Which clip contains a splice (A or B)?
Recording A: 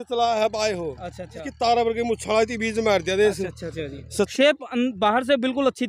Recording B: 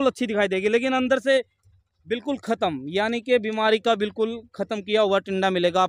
A